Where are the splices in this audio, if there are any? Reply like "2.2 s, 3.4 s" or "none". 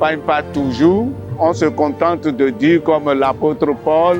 1.2 s